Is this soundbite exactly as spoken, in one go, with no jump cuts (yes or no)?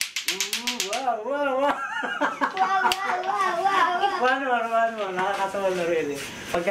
no